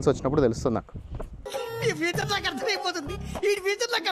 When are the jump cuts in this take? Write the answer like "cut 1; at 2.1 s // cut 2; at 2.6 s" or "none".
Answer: none